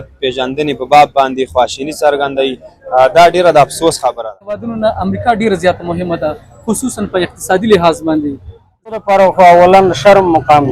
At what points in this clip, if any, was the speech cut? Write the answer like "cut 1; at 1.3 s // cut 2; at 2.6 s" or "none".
cut 1; at 4.7 s // cut 2; at 9.0 s